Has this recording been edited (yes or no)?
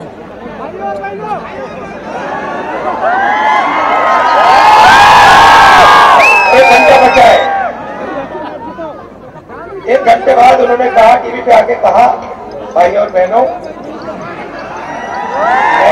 no